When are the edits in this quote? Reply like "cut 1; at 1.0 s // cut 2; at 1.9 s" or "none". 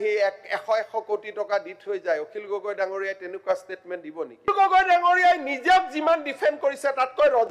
cut 1; at 4.5 s